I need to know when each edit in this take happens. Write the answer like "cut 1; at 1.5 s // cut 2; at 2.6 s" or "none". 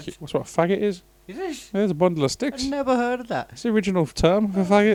none